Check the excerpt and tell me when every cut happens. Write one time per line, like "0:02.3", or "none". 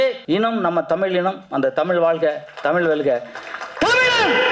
none